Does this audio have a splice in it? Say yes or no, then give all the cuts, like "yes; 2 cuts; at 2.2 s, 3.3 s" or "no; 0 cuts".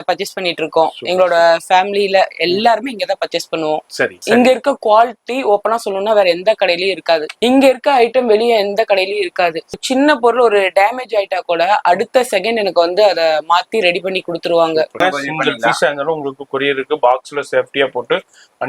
yes; 4 cuts; at 4.2 s, 7.3 s, 9.8 s, 15.0 s